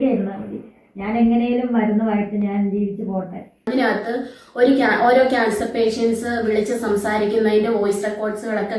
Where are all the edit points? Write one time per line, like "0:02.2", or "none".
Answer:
0:03.5